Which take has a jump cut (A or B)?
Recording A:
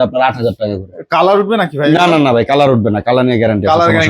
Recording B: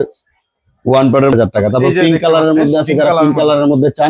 B